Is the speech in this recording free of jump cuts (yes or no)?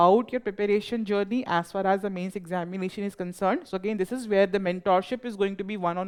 yes